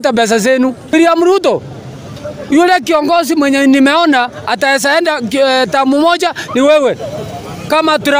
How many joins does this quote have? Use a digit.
1